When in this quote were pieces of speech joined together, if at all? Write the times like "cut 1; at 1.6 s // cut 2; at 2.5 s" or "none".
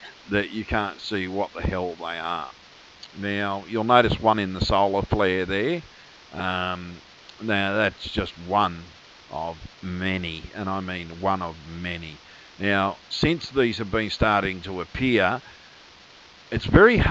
cut 1; at 15.5 s

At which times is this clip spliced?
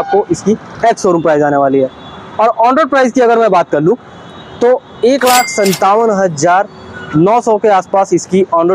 none

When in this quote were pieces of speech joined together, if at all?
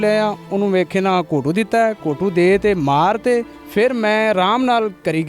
cut 1; at 3.6 s

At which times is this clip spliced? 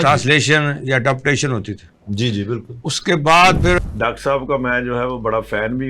cut 1; at 3.8 s

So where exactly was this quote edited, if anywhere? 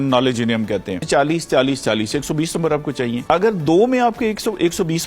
cut 1; at 1.0 s // cut 2; at 3.2 s

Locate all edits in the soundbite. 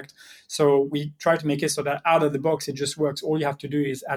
none

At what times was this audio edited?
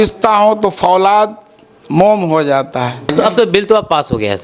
cut 1; at 3.1 s

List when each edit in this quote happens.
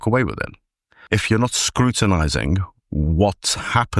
cut 1; at 1.0 s

